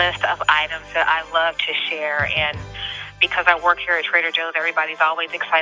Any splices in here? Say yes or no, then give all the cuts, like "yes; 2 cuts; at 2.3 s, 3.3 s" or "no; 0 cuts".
no; 0 cuts